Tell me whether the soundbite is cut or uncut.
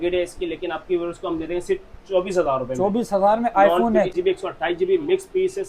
cut